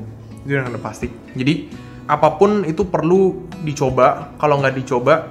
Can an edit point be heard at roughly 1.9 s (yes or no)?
yes